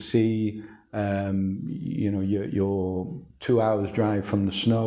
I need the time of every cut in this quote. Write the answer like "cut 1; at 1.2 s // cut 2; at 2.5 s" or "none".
none